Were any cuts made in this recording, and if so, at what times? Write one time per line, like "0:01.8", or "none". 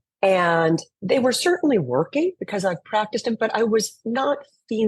0:00.9